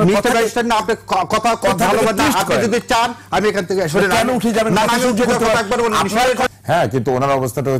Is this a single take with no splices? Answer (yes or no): no